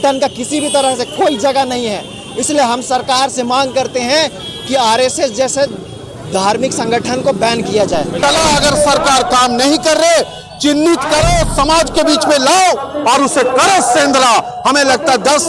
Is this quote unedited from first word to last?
no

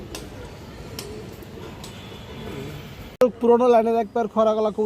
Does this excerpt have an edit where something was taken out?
yes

